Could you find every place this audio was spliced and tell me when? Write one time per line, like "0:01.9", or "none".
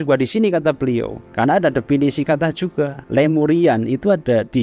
0:01.2
0:03.0